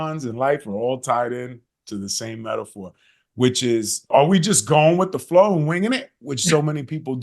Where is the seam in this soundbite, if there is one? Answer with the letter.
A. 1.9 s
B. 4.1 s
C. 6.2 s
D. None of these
B